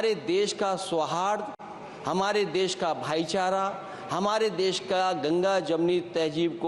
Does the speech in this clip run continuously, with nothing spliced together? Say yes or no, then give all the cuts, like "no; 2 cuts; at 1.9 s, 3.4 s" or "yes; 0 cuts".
yes; 0 cuts